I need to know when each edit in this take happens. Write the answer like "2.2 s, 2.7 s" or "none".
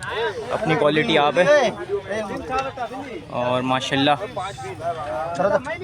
none